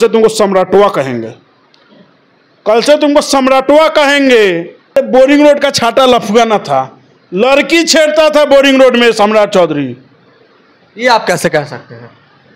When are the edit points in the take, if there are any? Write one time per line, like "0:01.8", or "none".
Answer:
0:04.9